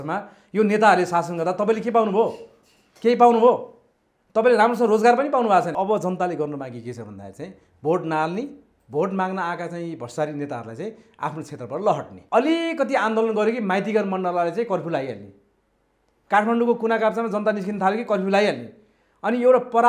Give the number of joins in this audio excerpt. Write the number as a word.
two